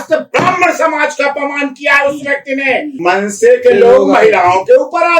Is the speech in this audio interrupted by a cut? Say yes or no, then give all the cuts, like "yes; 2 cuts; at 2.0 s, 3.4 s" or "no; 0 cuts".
yes; 1 cut; at 2.9 s